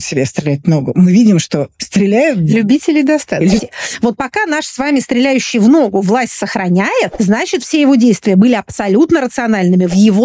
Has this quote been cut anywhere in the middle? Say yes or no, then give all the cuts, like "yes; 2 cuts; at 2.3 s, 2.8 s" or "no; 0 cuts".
yes; 3 cuts; at 1.8 s, 3.6 s, 7.1 s